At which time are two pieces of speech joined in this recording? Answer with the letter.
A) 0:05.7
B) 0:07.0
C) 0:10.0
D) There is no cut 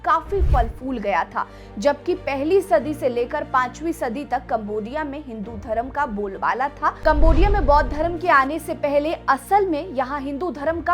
B